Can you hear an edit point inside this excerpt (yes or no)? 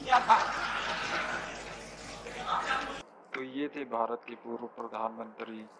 no